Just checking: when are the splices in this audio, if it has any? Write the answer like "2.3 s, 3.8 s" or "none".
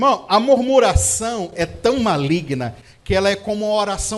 none